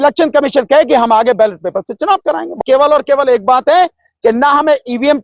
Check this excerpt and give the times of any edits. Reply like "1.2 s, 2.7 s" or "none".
2.5 s